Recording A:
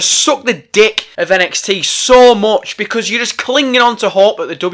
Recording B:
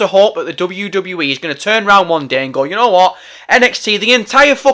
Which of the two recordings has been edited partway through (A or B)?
A